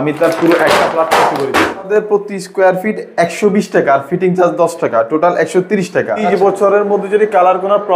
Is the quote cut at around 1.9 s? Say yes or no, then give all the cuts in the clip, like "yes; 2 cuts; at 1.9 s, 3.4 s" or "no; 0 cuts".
yes; 2 cuts; at 1.9 s, 6.2 s